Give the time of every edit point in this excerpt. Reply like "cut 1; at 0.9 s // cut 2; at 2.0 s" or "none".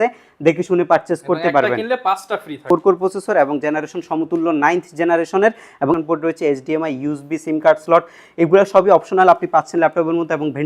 cut 1; at 2.6 s // cut 2; at 6.0 s